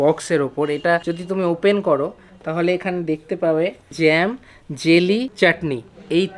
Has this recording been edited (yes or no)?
yes